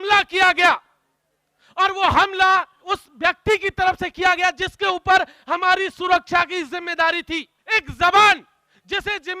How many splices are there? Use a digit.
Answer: 2